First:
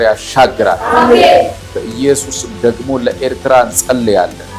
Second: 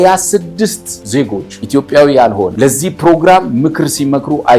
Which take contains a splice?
second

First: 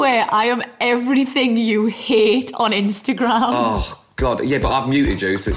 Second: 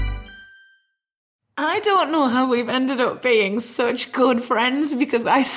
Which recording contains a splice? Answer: second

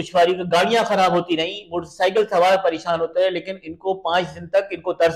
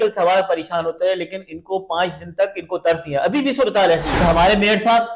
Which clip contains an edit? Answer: second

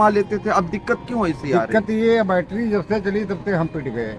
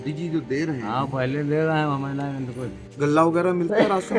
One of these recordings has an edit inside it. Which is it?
second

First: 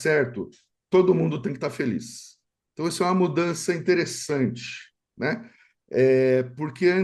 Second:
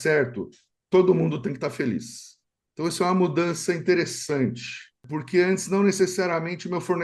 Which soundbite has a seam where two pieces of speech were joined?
second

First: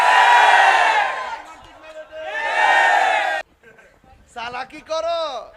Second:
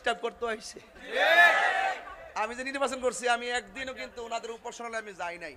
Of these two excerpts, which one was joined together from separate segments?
first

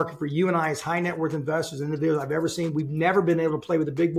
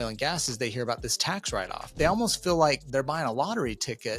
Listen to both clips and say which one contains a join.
second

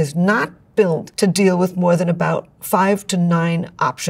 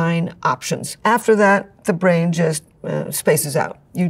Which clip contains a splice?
first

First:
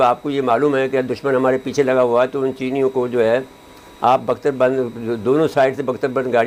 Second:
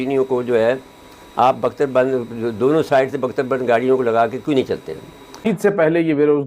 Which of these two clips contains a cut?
second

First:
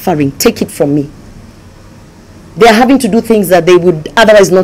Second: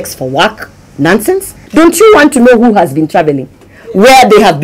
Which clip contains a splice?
second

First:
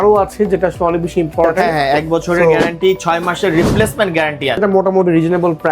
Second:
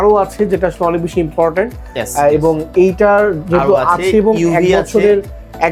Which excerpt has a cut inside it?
first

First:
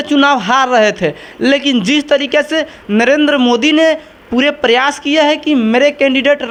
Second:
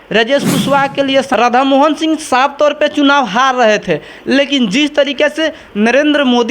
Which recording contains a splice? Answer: second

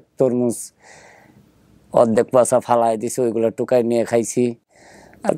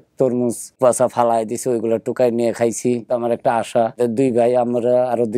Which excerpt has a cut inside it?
second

